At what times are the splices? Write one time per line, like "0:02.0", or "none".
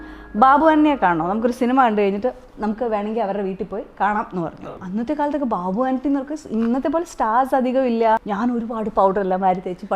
0:04.6
0:08.2